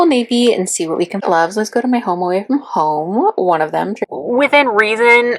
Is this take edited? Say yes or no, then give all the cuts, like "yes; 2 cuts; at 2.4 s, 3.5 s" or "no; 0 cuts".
yes; 2 cuts; at 1.2 s, 4.0 s